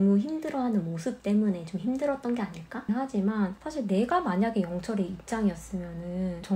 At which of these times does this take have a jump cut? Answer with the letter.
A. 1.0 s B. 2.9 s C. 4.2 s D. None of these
B